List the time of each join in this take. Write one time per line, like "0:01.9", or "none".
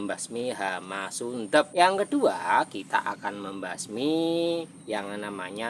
0:01.7

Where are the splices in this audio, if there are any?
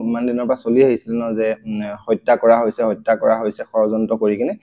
none

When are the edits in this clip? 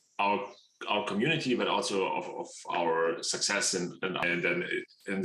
0:04.2

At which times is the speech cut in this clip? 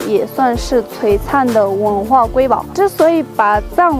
0:02.7

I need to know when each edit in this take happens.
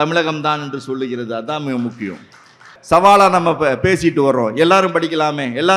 0:02.7

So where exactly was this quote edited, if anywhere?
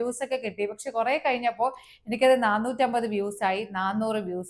none

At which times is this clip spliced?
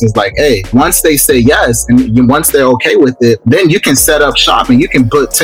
0:00.7
0:03.4

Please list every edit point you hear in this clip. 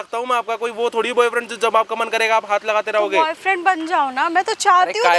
none

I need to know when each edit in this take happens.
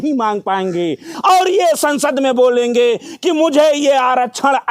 0:01.1

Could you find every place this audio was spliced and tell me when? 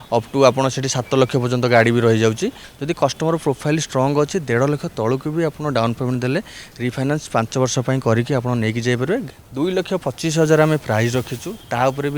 0:02.7
0:09.2

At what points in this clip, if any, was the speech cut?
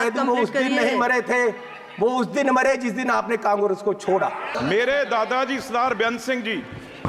0:04.5

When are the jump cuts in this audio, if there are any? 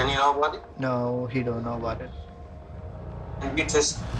0:02.1

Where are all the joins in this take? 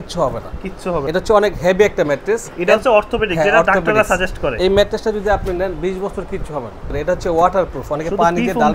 0:01.0
0:04.5
0:07.0

